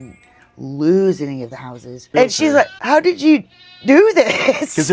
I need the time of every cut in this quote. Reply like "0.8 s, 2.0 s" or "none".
2.1 s, 2.8 s